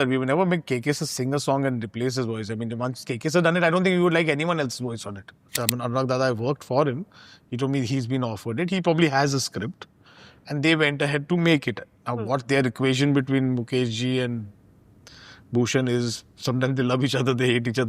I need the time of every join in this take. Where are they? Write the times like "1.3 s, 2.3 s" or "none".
5.5 s